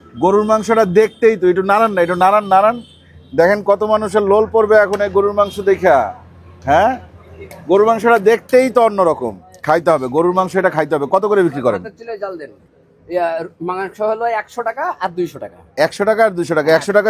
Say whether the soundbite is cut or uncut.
uncut